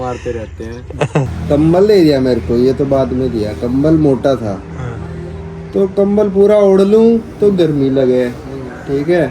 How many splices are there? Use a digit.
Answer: 1